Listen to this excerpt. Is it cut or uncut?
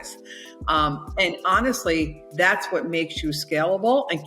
uncut